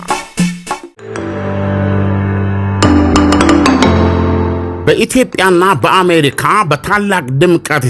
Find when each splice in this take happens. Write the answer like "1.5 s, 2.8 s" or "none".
0.9 s